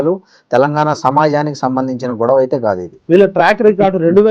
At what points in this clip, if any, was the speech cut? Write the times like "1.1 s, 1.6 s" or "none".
2.9 s